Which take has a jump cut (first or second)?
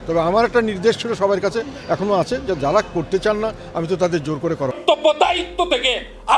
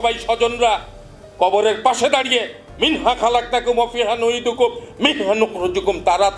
first